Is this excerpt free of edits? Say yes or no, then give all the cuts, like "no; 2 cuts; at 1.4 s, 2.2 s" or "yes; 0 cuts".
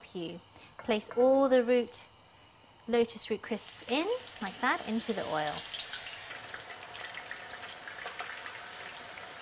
no; 1 cut; at 3.7 s